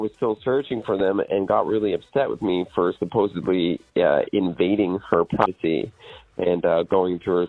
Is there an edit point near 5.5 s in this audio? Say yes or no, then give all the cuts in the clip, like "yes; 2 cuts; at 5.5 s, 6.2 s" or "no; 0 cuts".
yes; 1 cut; at 5.5 s